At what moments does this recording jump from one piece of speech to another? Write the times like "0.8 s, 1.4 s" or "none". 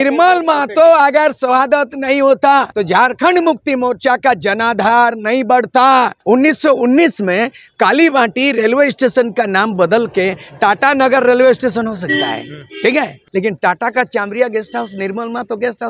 2.7 s, 6.2 s, 13.2 s